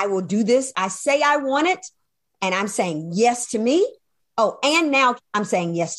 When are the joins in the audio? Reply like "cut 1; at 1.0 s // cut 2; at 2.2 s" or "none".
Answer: cut 1; at 4.1 s // cut 2; at 5.2 s